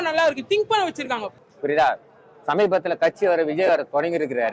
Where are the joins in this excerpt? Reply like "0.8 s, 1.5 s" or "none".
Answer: 1.3 s

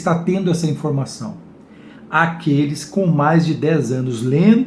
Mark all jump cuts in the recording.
none

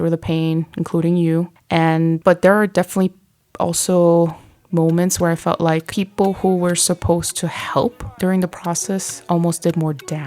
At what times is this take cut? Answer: 1.6 s

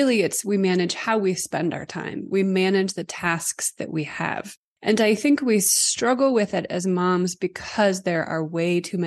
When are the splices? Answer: none

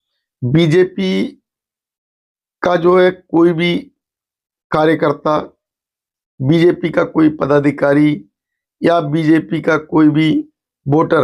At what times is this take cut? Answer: none

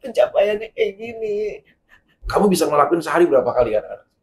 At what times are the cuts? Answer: 2.2 s

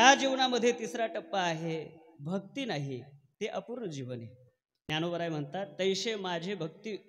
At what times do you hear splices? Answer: 4.9 s

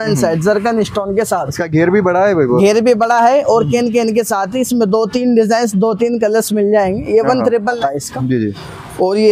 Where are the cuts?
7.8 s

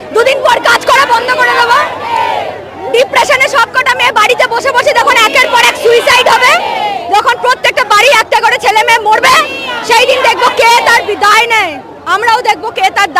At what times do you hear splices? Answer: none

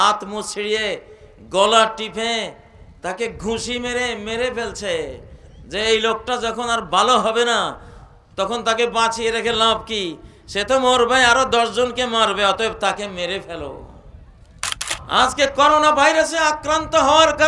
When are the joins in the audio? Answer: 14.9 s

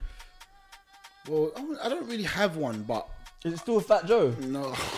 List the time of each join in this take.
none

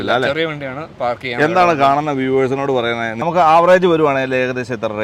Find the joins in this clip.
3.1 s

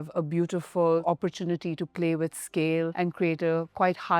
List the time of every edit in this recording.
1.0 s, 2.9 s

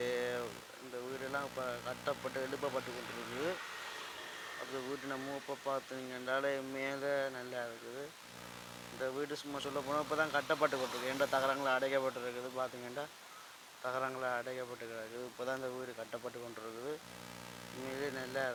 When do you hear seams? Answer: none

